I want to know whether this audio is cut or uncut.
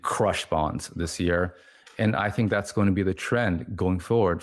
uncut